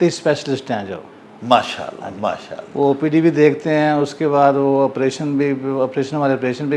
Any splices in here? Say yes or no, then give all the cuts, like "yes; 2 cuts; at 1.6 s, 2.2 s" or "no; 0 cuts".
no; 0 cuts